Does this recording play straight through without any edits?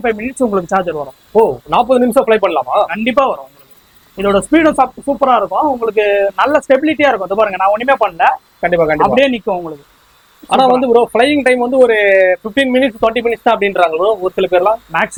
yes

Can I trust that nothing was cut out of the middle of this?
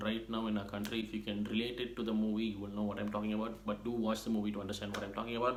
yes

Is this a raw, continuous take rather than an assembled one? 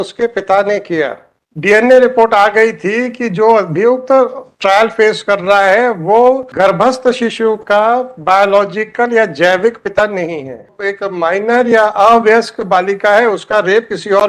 no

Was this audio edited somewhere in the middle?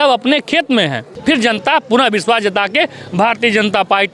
yes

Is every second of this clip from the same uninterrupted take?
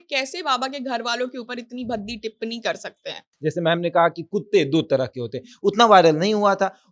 no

